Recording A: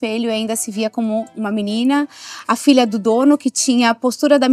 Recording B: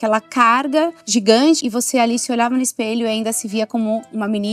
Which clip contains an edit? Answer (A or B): B